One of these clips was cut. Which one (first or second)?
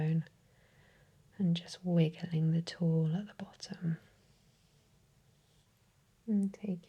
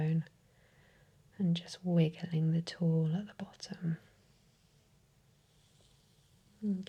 first